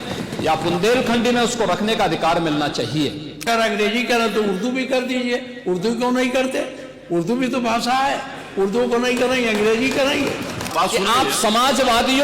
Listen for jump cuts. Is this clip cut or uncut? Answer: cut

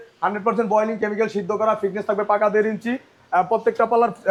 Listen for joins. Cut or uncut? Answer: uncut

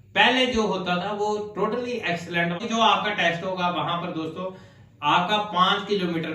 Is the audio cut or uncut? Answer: cut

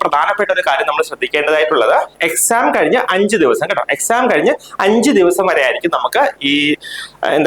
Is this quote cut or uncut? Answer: uncut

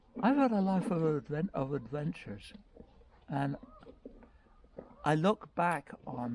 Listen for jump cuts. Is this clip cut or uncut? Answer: uncut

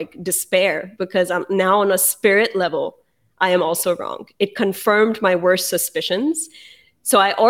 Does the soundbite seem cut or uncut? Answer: uncut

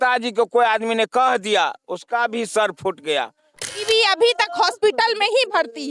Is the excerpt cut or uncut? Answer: cut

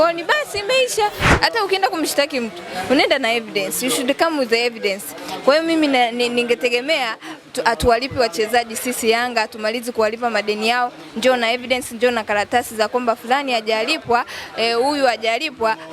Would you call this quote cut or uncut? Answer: cut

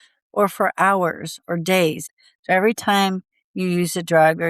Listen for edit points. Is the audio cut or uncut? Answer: cut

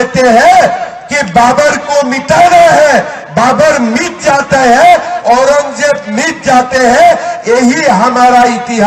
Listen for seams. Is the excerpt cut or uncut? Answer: uncut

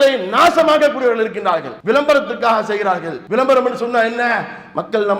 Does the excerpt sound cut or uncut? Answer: cut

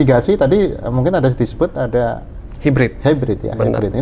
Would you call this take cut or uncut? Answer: uncut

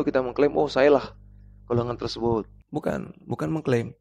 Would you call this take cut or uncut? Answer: cut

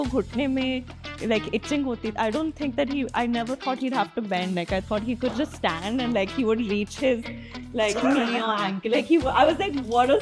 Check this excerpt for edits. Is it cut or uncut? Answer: uncut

